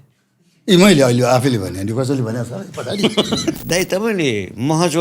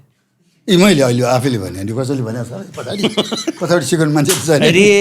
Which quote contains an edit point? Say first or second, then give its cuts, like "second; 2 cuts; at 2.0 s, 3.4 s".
first; 1 cut; at 3.6 s